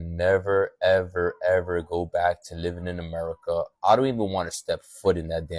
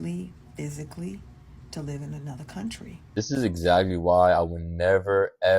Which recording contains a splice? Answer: second; 1 cut; at 3.0 s

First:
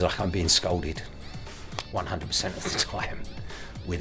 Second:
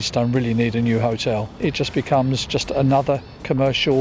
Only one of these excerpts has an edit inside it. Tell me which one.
second; 1 cut; at 1.6 s

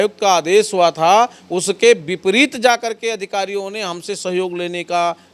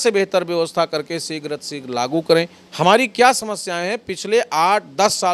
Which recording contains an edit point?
second; 1 cut; at 2.6 s

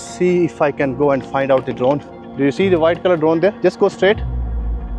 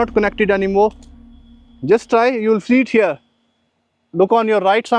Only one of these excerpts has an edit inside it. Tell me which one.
first; 1 cut; at 2.2 s

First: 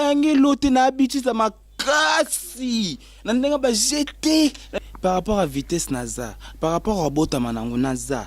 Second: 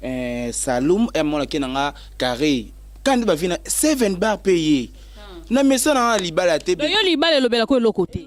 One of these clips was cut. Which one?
first; 1 cut; at 4.8 s

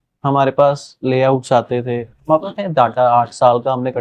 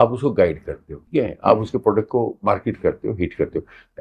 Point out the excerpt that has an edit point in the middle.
second; 2 cuts; at 1.0 s, 2.4 s

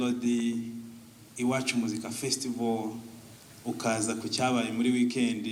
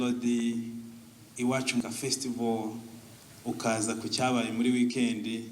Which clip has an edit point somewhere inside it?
second; 1 cut; at 1.8 s

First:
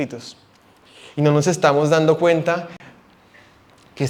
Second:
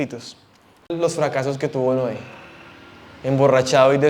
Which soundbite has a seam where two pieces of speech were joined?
second; 1 cut; at 0.9 s

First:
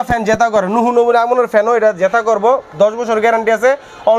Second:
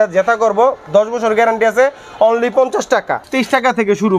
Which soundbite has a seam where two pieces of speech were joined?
second; 1 cut; at 3.2 s

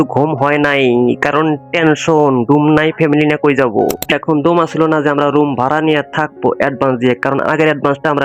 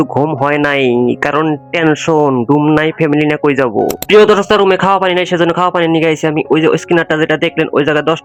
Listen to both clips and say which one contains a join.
first; 1 cut; at 4.1 s

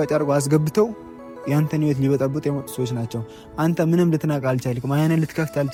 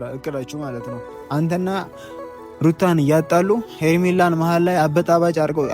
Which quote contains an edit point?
second; 1 cut; at 1.1 s

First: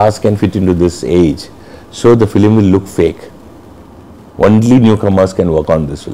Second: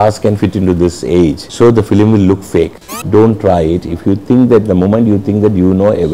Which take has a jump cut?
second; 2 cuts; at 1.4 s, 2.9 s

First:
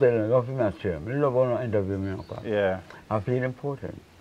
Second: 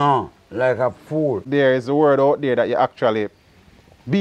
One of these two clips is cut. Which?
second; 1 cut; at 1.4 s

